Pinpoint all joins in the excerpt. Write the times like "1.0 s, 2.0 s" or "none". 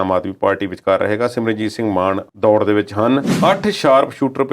3.3 s